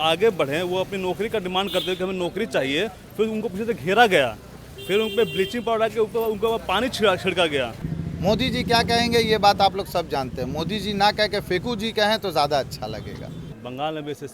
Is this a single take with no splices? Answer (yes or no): no